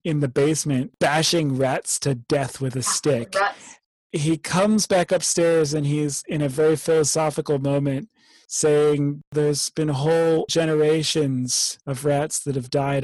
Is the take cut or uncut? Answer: cut